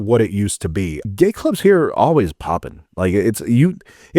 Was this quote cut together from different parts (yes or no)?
yes